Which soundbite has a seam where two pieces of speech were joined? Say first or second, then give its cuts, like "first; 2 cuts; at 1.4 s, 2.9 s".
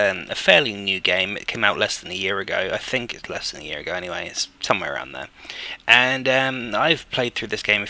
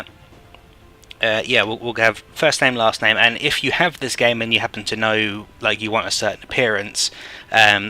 second; 1 cut; at 3.5 s